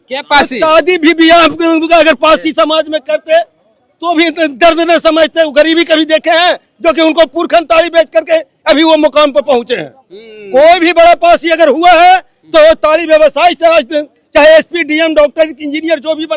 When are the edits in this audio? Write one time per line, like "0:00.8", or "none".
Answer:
none

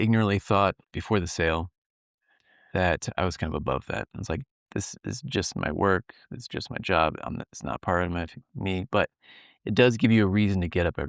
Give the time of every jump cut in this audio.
0:00.9

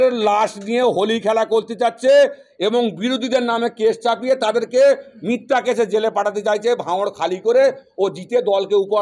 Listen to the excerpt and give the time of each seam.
none

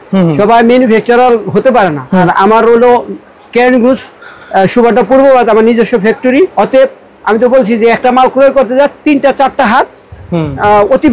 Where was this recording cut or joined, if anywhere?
0:02.2
0:06.5

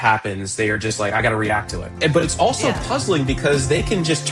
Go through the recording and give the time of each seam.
0:01.9

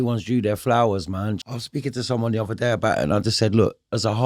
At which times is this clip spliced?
0:01.4

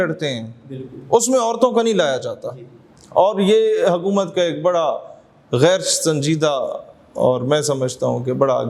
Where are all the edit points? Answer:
none

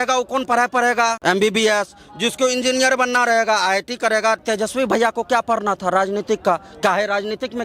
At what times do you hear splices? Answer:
0:01.2
0:04.4

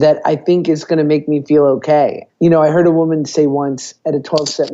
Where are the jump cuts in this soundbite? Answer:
0:02.2

